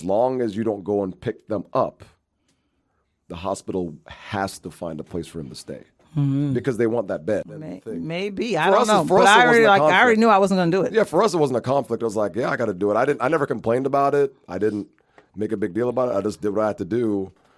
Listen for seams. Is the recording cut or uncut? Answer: cut